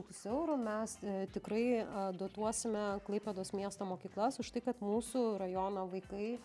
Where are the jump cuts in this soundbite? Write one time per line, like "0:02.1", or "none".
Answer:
none